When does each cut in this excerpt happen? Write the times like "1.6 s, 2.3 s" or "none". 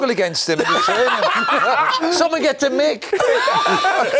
2.0 s